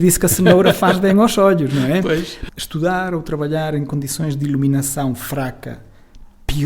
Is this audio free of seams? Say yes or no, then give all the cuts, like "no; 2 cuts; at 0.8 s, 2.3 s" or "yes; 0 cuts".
no; 1 cut; at 2.4 s